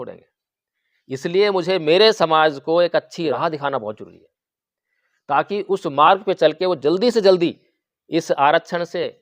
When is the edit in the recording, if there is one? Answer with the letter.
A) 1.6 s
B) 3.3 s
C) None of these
B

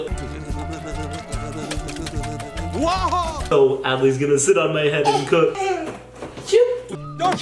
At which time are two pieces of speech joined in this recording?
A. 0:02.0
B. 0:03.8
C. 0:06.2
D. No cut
D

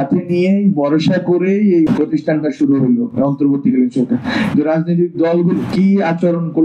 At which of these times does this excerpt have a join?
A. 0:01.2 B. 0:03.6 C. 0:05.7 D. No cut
C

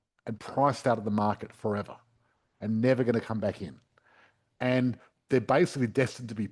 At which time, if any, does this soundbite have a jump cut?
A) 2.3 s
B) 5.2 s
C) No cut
C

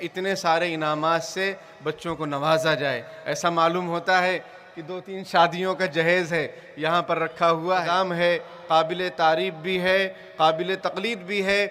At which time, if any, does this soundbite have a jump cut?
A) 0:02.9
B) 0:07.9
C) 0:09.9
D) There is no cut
B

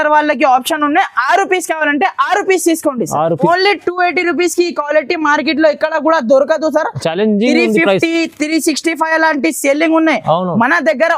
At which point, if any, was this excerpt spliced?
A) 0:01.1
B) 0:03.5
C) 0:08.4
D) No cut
B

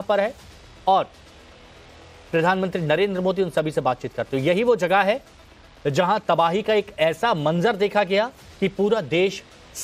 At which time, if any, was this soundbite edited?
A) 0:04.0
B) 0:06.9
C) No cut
A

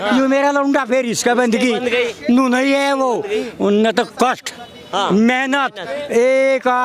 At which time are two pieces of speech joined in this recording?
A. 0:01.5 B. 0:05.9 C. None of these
B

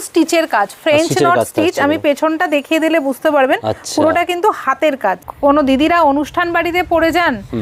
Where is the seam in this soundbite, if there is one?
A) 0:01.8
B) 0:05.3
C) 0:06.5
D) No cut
B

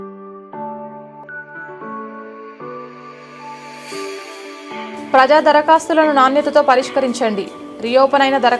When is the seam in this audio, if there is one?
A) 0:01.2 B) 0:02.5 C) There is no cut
A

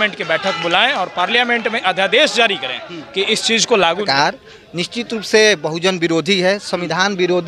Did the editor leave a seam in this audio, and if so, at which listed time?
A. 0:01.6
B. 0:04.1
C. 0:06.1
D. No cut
B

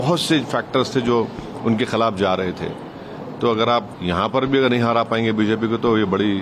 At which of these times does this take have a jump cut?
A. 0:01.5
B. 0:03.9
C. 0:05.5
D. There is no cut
B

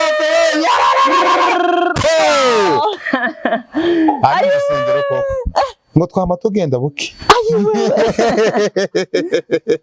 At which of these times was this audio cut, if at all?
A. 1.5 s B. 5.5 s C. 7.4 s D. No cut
D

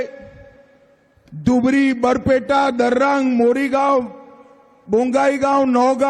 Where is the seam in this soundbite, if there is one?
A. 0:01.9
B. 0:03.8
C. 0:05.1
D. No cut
B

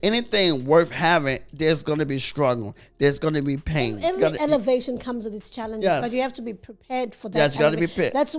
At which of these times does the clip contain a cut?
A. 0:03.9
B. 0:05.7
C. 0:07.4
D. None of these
A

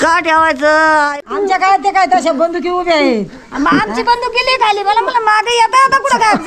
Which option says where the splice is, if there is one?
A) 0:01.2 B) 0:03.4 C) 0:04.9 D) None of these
A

